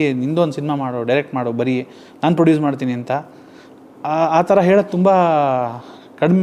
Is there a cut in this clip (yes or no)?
no